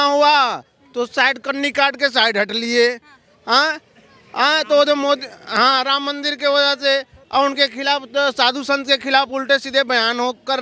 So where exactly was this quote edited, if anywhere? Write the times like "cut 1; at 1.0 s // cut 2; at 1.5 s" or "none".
none